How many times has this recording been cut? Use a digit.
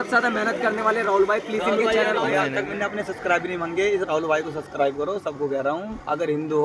1